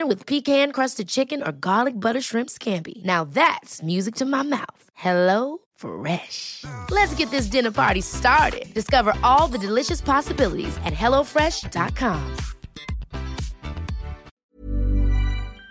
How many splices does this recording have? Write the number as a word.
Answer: one